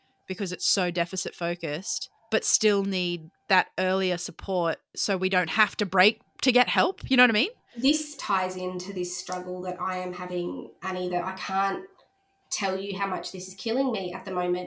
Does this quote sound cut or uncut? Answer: cut